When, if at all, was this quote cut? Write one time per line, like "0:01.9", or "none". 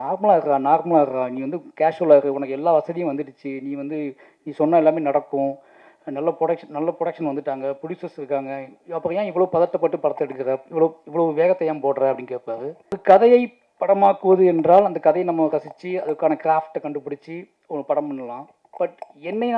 0:13.0